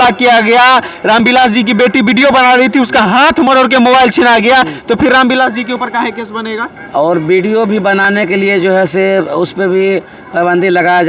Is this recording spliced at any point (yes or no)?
no